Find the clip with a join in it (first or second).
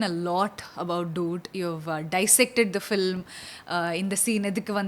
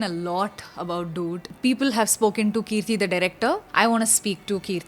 second